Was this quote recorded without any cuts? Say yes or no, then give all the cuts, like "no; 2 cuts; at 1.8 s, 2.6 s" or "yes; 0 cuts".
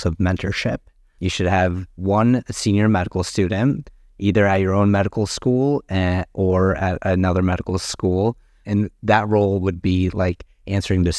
yes; 0 cuts